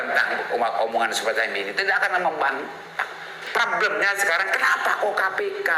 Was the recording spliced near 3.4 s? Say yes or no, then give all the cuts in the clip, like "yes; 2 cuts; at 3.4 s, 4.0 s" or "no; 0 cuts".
yes; 1 cut; at 3.4 s